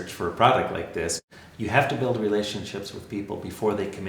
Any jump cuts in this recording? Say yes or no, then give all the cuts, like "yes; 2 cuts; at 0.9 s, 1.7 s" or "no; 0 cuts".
yes; 1 cut; at 1.2 s